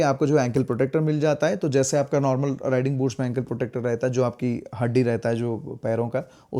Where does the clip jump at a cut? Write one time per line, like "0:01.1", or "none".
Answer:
none